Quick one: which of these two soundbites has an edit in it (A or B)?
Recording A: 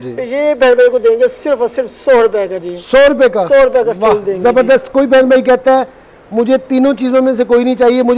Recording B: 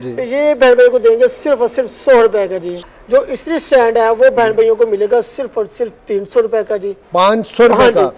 B